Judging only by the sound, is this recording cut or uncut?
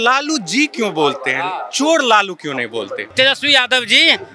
cut